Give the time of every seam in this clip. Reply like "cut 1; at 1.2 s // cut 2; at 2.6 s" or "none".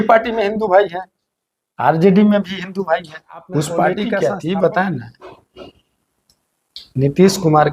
cut 1; at 4.2 s